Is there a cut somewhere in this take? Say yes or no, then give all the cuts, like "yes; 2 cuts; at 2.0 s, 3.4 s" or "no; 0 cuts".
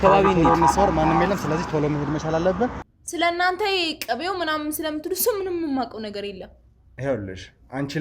yes; 1 cut; at 2.9 s